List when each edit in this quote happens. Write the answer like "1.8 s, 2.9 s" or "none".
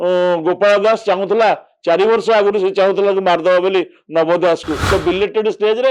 4.8 s